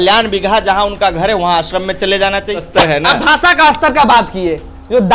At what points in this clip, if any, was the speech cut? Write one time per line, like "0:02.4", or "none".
0:02.5